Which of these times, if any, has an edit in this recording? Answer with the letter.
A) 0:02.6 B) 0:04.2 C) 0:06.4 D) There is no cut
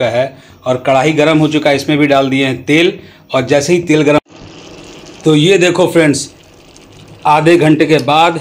B